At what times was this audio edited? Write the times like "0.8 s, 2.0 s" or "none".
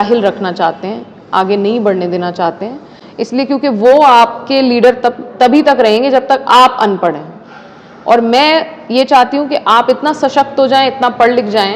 none